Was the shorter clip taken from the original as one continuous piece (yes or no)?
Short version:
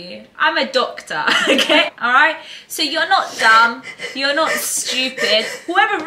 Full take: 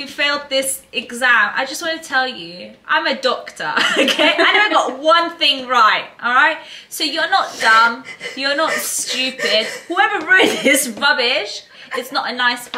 no